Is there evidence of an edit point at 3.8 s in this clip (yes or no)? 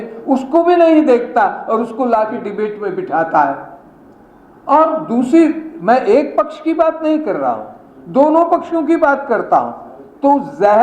no